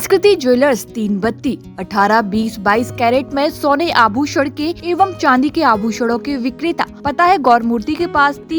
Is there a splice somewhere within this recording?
yes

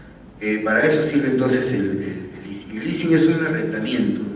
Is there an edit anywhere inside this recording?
yes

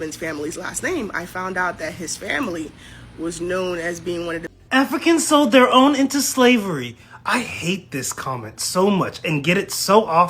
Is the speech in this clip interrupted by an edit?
yes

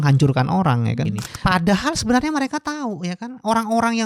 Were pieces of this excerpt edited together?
yes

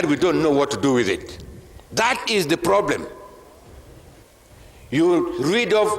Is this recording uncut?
no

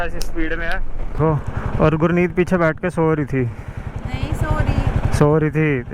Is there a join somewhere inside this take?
yes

